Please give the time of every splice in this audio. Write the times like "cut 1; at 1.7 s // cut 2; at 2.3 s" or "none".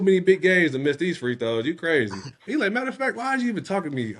cut 1; at 2.4 s

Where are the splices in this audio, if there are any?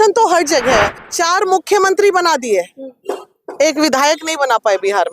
cut 1; at 1.0 s

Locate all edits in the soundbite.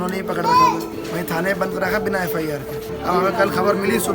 cut 1; at 0.9 s // cut 2; at 2.9 s

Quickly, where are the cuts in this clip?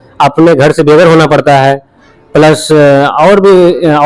none

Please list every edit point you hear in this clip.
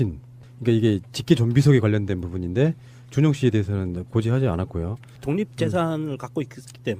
cut 1; at 2.6 s

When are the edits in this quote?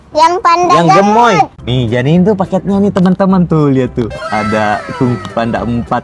cut 1; at 1.6 s

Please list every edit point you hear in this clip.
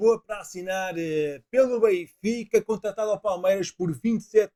none

